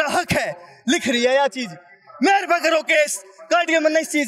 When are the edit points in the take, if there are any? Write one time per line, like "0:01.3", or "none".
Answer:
none